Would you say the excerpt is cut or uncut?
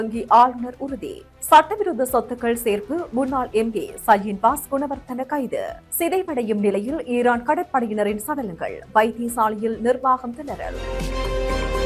cut